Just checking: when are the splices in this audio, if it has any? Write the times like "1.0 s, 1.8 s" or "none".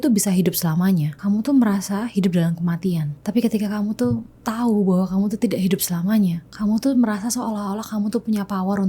1.1 s, 3.2 s, 6.5 s